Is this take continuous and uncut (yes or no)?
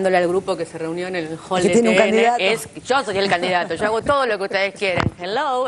yes